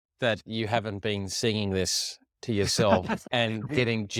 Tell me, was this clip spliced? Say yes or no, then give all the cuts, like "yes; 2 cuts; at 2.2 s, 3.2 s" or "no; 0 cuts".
no; 0 cuts